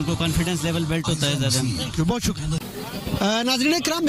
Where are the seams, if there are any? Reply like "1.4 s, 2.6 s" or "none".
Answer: none